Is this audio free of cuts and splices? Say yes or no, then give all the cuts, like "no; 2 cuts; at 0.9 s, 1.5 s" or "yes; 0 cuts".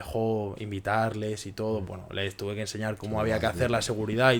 yes; 0 cuts